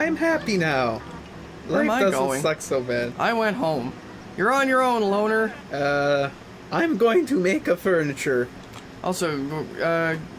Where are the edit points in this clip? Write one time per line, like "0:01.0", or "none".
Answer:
none